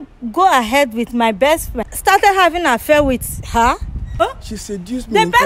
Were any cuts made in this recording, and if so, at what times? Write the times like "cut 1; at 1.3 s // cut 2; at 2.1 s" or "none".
cut 1; at 1.9 s // cut 2; at 4.2 s